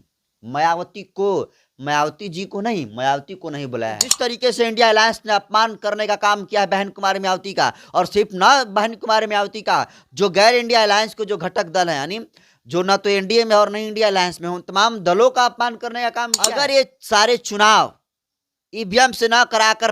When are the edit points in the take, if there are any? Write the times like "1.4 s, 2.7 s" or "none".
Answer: 4.2 s, 16.4 s